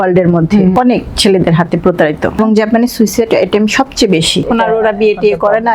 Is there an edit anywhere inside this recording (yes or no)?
yes